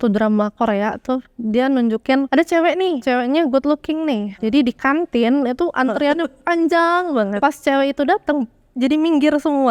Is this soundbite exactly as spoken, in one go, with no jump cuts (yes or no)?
no